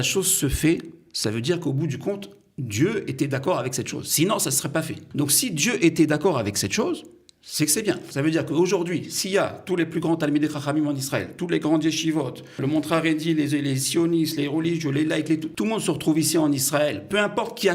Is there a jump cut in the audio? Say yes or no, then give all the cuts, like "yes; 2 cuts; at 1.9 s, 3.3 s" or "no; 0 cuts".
yes; 4 cuts; at 5.1 s, 8.1 s, 12.6 s, 15.5 s